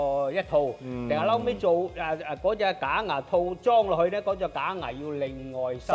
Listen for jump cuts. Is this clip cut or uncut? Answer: uncut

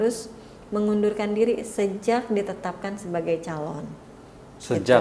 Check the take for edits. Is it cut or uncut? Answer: uncut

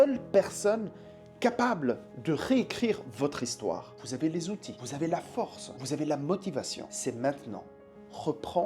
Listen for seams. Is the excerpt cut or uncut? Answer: cut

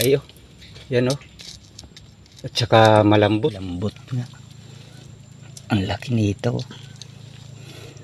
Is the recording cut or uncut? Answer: cut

